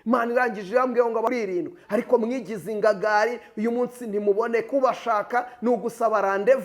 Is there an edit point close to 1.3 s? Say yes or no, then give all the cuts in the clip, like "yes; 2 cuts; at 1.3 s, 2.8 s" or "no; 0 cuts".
yes; 1 cut; at 1.3 s